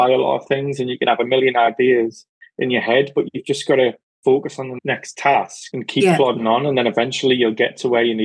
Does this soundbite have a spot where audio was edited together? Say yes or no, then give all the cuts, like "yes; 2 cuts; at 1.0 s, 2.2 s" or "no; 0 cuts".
no; 0 cuts